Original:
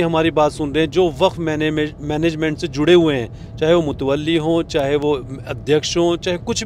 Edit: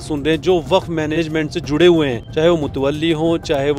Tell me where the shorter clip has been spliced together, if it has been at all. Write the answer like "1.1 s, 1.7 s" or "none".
1.1 s, 2.2 s